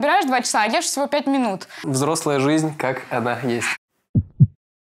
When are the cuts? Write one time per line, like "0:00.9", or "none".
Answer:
0:01.8